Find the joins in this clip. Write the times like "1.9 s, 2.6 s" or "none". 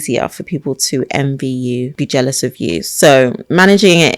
1.9 s